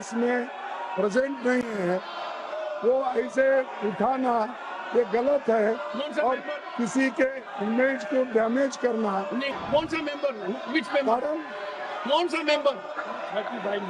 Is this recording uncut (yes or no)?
no